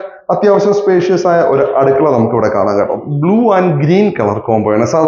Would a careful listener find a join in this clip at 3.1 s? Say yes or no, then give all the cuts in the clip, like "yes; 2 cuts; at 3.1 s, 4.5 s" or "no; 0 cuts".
yes; 1 cut; at 3.1 s